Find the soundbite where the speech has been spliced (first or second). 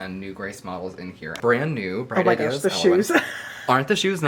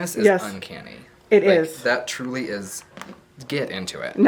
first